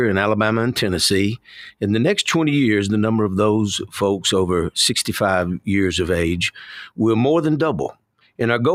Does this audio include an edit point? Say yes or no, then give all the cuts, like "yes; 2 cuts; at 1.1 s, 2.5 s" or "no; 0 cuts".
no; 0 cuts